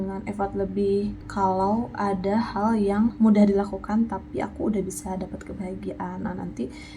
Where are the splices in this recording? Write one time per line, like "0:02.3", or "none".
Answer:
0:01.2